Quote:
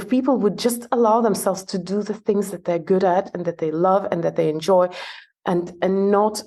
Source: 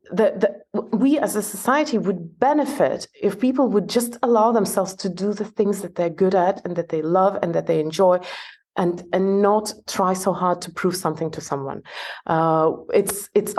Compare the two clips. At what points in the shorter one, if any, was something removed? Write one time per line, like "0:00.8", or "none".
none